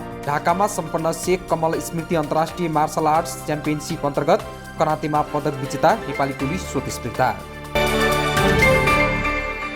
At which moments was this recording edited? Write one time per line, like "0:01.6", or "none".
0:07.5